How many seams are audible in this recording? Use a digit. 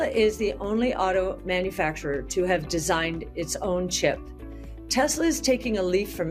0